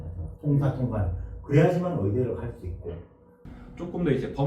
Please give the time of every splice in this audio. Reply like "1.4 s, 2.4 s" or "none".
3.4 s

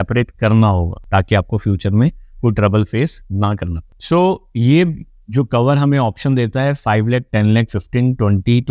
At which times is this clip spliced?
none

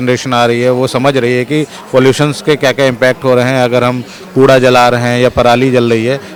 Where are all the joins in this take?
none

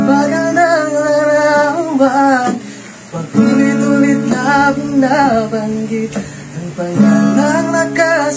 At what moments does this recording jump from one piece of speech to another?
none

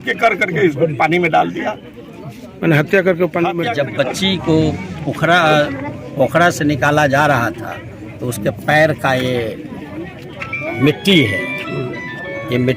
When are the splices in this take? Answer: 3.7 s

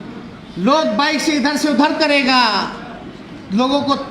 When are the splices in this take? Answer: none

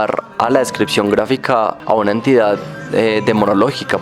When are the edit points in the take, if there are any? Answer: 1.8 s

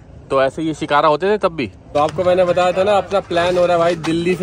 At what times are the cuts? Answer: 1.8 s

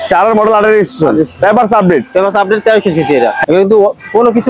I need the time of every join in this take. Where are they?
3.4 s

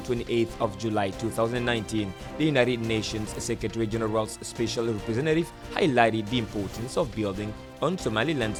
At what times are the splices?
none

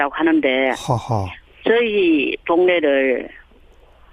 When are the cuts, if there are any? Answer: 1.2 s

